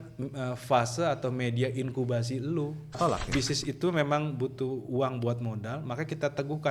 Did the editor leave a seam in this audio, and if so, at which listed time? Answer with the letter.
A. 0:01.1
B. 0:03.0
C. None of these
B